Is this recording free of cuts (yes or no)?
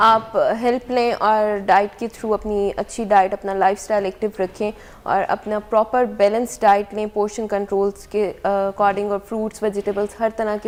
yes